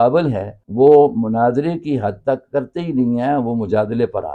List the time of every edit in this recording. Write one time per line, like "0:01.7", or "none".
none